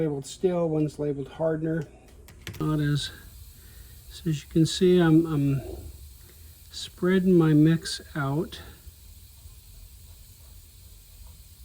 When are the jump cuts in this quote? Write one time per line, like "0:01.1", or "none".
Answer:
0:02.6